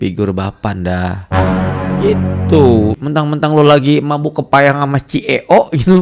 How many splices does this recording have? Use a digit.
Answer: 1